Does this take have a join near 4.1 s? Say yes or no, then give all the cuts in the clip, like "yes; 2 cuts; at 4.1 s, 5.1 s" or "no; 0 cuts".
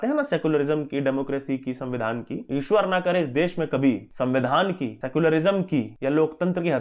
yes; 4 cuts; at 2.3 s, 4.1 s, 5.0 s, 5.9 s